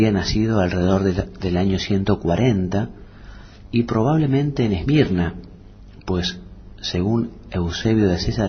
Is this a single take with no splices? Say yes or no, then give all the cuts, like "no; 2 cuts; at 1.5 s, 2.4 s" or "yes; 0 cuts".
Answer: no; 1 cut; at 3.3 s